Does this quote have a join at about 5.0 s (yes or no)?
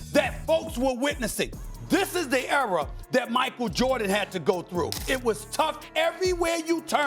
yes